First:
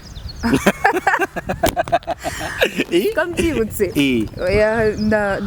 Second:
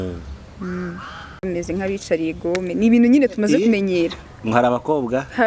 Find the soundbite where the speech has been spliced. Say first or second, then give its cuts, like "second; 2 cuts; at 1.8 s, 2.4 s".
second; 1 cut; at 1.4 s